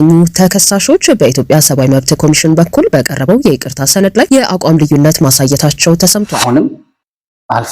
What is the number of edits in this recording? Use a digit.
1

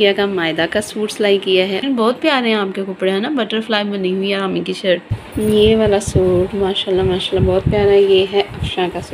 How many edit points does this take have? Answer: 2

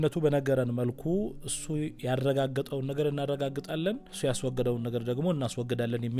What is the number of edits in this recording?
1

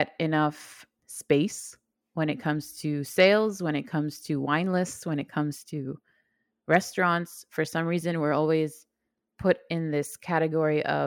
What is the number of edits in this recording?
0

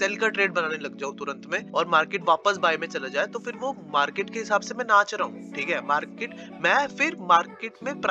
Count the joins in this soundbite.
1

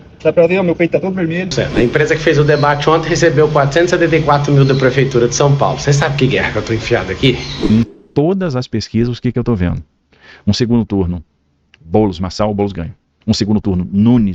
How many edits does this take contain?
2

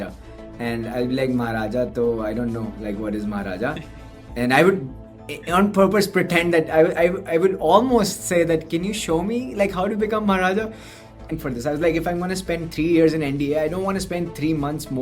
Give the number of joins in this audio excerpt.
1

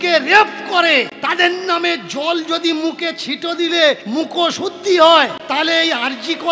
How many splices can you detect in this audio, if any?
3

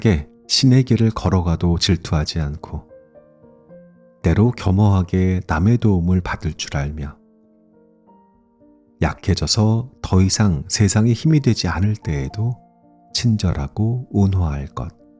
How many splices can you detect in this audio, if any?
0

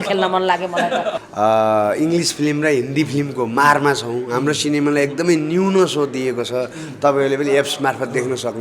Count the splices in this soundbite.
1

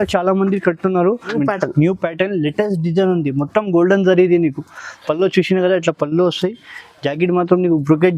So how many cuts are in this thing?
1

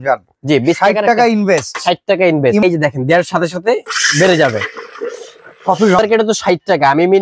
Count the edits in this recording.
2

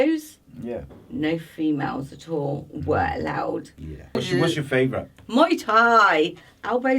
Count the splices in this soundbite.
1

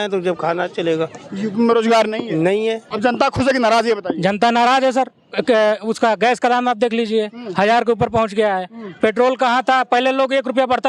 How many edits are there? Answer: 1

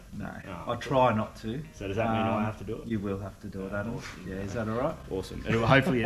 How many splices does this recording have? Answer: 0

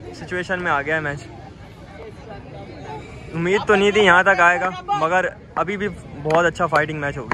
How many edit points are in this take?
0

